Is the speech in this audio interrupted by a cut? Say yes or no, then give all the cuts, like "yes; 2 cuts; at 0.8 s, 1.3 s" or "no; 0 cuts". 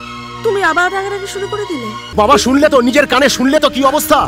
yes; 1 cut; at 2.0 s